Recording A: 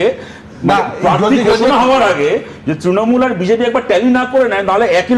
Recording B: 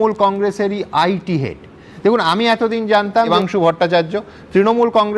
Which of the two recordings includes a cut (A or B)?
B